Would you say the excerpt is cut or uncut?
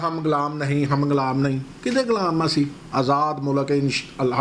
uncut